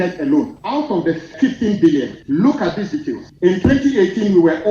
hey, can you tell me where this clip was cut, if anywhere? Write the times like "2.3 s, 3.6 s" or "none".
1.0 s, 2.2 s, 3.2 s